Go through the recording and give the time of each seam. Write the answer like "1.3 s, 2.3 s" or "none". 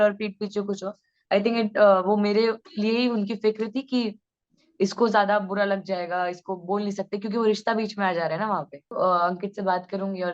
8.9 s